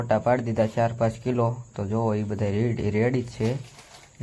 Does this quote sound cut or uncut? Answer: cut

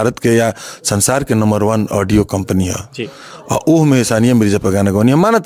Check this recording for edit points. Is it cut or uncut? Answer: uncut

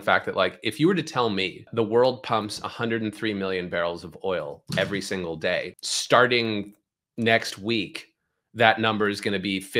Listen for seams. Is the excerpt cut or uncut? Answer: cut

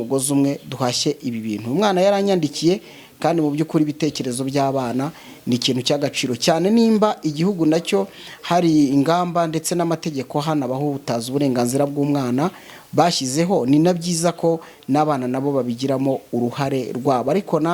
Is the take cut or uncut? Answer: uncut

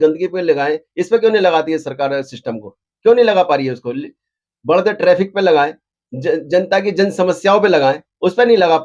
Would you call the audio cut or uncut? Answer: uncut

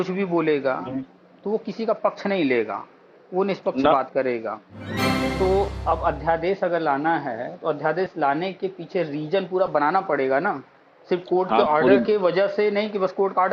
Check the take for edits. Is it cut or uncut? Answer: cut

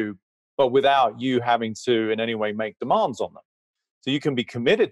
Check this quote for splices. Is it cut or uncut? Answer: uncut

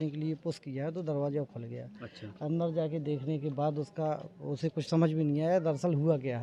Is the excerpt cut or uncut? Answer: uncut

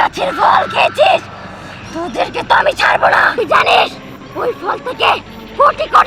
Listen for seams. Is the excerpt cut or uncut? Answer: cut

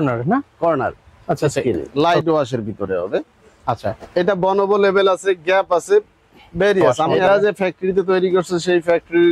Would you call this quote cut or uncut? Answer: cut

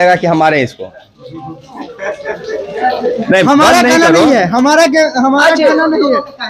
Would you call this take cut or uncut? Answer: uncut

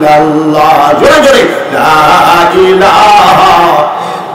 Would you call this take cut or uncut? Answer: uncut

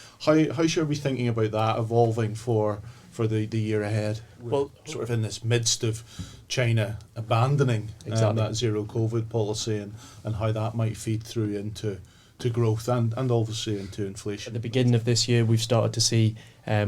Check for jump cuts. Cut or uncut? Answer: cut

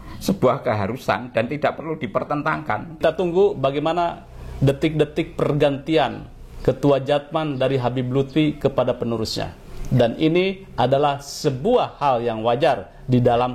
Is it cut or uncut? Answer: cut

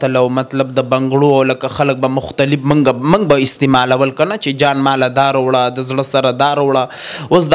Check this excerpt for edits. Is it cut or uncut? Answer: uncut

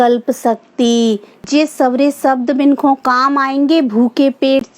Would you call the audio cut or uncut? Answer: cut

